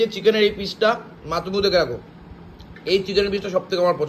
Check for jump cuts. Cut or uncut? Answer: uncut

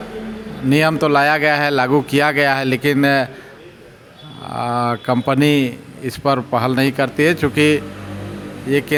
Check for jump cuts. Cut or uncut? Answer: uncut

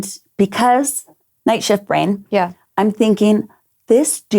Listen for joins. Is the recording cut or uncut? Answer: cut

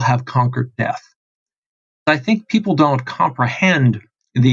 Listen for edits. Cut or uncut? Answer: cut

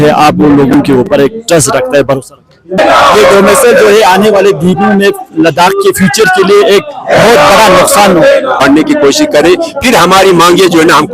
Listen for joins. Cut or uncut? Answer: cut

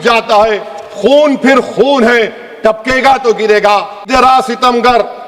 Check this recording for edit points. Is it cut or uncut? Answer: cut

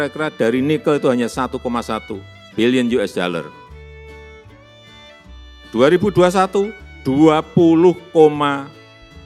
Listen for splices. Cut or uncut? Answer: uncut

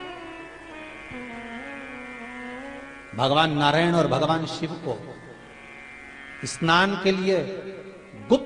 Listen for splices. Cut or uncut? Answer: uncut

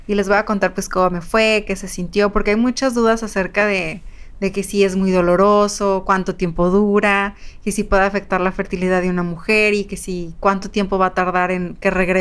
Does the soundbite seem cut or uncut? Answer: uncut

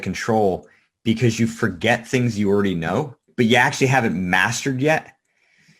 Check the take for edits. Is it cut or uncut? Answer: cut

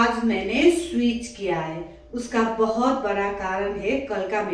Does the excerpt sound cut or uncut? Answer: uncut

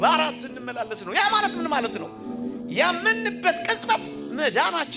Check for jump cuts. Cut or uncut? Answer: uncut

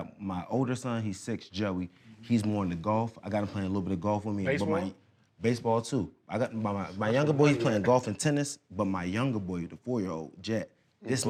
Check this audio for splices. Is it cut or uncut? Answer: uncut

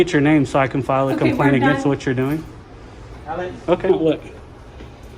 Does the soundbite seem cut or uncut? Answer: cut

